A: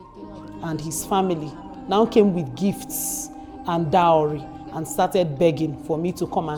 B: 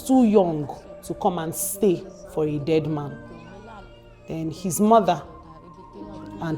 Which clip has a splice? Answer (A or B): B